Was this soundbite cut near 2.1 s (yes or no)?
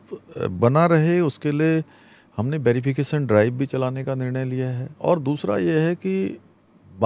no